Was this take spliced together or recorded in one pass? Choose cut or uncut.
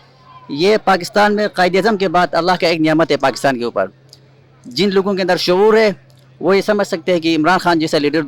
uncut